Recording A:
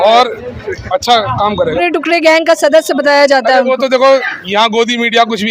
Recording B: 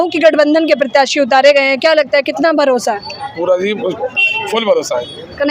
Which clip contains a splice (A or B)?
A